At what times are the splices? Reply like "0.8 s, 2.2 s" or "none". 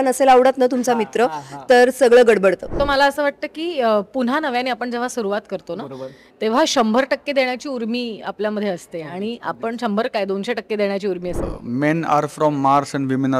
2.7 s, 11.5 s

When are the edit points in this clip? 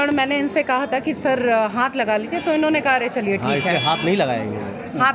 none

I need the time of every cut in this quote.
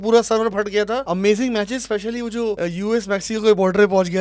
1.0 s, 2.6 s

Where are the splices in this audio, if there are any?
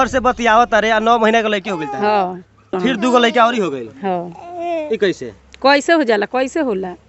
2.8 s

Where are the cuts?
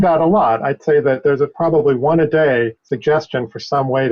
2.8 s

